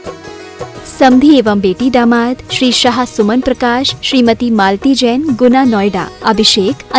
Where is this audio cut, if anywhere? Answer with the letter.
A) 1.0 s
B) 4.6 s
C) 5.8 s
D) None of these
A